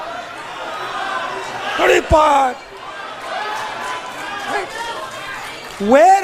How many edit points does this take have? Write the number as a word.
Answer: zero